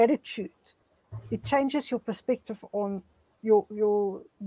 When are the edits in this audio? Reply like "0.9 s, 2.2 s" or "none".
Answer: none